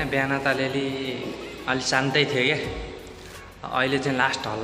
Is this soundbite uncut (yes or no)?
yes